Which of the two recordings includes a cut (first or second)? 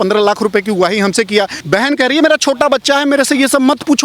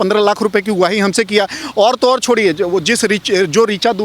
first